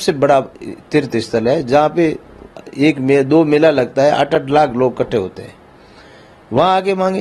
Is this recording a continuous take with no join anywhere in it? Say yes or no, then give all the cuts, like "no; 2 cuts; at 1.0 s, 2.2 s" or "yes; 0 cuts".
yes; 0 cuts